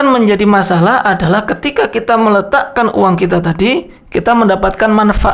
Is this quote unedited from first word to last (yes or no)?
yes